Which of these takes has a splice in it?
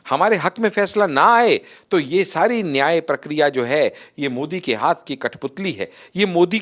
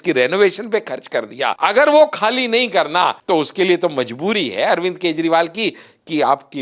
second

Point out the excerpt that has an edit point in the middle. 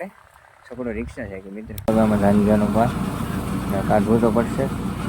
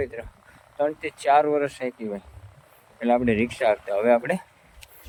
first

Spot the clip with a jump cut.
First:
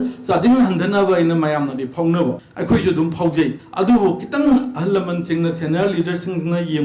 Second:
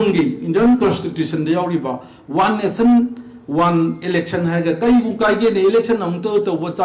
first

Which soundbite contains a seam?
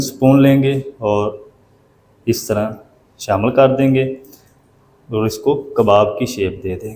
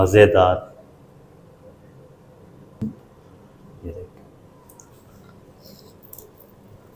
second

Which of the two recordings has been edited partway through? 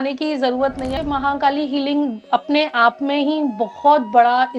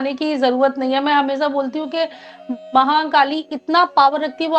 first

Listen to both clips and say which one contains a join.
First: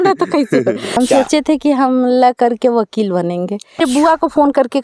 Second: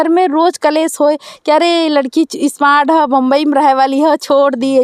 first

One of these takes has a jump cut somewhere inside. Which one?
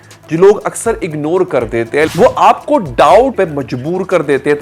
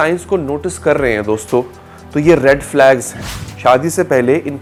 first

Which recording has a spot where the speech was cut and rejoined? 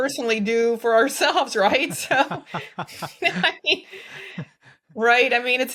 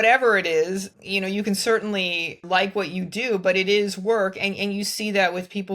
second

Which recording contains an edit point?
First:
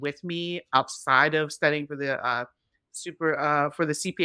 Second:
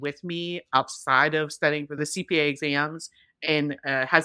second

